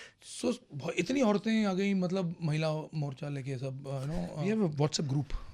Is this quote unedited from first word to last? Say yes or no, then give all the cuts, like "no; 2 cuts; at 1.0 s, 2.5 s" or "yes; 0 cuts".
no; 1 cut; at 4.4 s